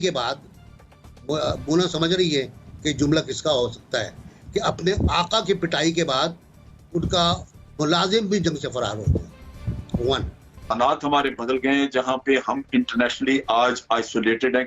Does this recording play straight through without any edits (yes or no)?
no